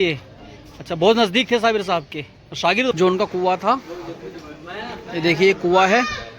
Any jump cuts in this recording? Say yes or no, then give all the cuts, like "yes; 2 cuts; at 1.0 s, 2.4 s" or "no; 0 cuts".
yes; 1 cut; at 2.9 s